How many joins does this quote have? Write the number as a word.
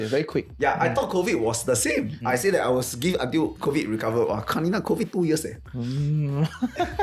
one